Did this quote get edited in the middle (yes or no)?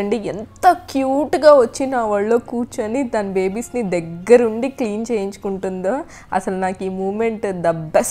no